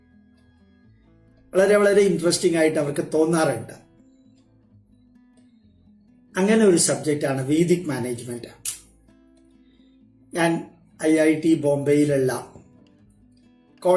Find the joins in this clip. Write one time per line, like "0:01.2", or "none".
0:04.4
0:06.3